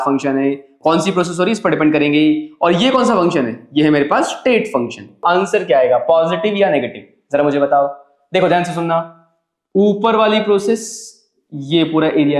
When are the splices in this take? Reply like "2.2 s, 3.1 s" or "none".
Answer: 5.2 s

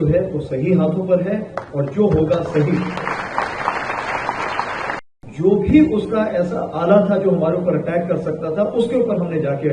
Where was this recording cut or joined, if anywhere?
5.0 s

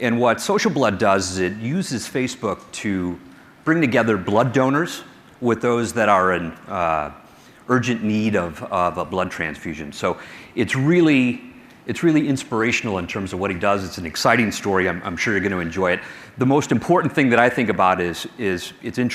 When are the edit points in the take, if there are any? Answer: 0.9 s

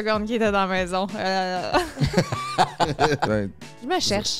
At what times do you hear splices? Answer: 3.3 s

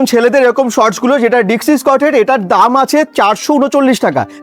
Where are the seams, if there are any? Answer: none

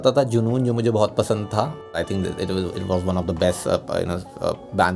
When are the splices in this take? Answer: 2.0 s

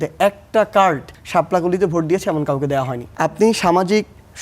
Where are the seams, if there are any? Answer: 1.1 s, 3.0 s

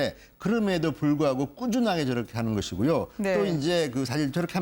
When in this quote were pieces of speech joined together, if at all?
1.1 s

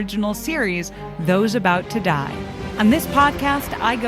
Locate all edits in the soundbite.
2.6 s

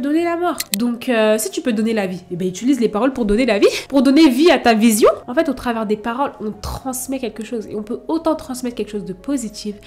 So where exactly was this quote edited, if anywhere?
5.2 s

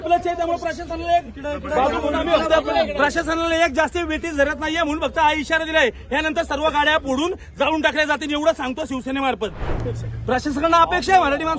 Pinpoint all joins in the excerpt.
9.8 s

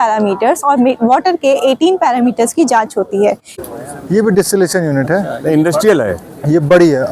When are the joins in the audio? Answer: 3.5 s

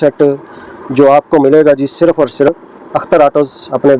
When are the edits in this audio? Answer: 2.7 s

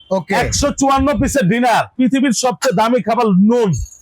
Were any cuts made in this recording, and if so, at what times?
1.9 s

